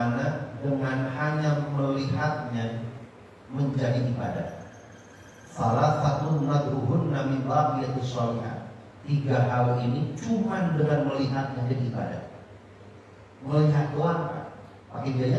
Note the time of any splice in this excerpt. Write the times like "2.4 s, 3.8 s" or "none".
none